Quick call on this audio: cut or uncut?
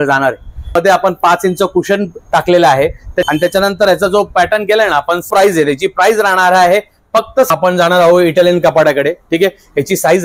cut